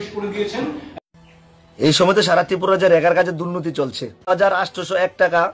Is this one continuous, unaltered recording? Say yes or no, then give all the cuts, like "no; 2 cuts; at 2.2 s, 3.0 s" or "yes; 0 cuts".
no; 2 cuts; at 0.9 s, 4.3 s